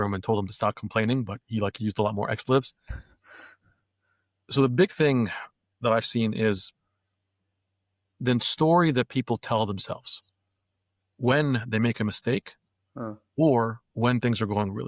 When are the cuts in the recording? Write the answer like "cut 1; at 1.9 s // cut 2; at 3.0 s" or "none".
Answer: none